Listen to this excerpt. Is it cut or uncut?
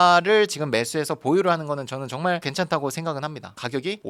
uncut